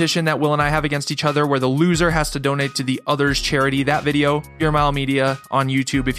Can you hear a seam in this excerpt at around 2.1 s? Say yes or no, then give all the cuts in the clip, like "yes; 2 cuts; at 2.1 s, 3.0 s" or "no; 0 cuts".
no; 1 cut; at 4.5 s